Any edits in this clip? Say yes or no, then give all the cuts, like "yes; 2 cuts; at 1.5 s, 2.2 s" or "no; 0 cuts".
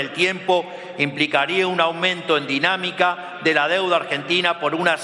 no; 0 cuts